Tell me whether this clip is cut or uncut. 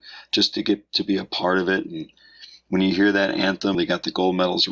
cut